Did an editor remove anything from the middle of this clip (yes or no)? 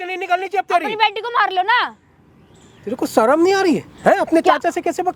no